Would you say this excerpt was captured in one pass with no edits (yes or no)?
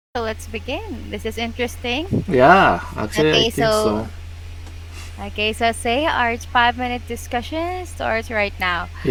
yes